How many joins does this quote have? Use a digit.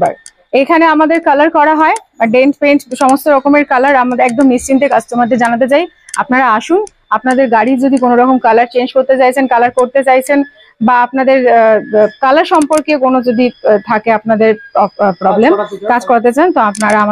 0